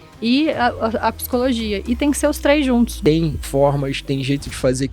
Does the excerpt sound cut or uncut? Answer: cut